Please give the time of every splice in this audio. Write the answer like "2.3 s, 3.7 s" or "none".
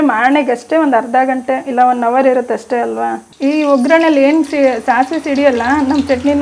3.2 s